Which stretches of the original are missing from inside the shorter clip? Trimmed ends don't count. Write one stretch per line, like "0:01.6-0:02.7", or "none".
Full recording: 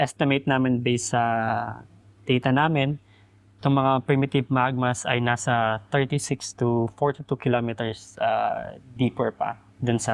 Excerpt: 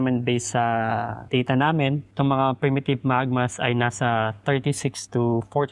0:01.7-0:02.1
0:03.0-0:03.5